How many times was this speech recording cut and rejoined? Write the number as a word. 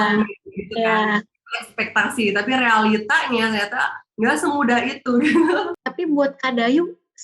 one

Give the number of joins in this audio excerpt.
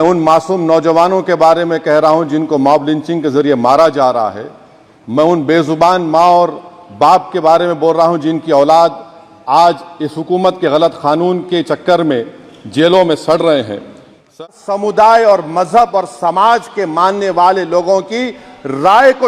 one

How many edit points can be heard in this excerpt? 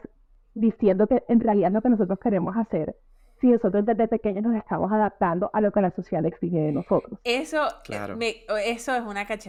zero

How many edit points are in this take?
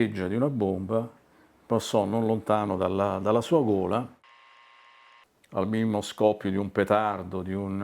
one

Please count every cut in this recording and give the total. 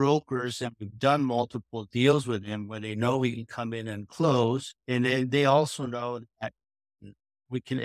one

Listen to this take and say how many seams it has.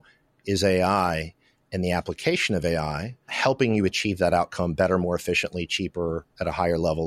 one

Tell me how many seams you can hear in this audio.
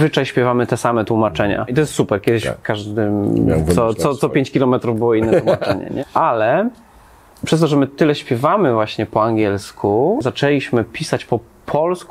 three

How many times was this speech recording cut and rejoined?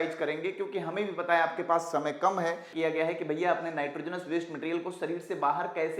one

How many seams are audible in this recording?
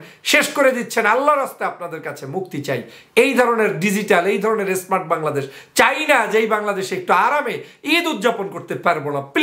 zero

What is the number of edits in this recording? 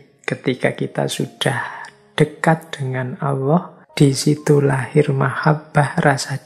one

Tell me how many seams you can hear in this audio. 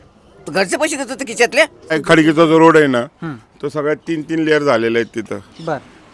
one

